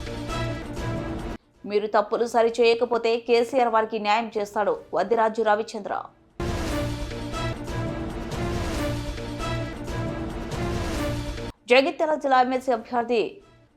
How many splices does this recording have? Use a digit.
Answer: 0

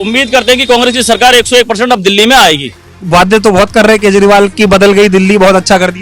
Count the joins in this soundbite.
1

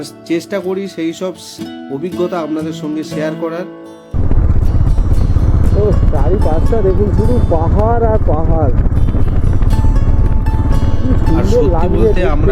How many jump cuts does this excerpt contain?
1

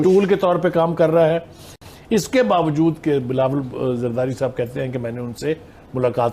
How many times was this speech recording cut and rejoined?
1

